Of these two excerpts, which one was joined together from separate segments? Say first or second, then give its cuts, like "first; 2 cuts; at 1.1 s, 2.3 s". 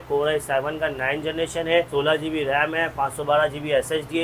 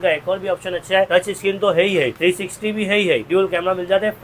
second; 3 cuts; at 1.1 s, 2.1 s, 3.3 s